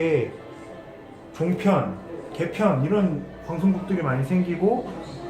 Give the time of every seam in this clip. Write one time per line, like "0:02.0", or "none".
0:03.7